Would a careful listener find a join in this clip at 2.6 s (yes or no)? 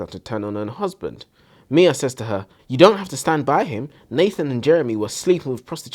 yes